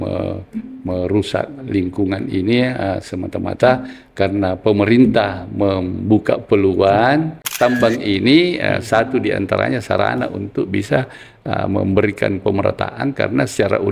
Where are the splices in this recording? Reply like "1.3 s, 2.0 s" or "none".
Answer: 7.4 s